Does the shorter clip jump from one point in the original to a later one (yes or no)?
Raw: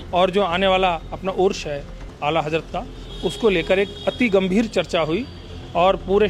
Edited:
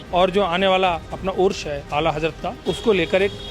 yes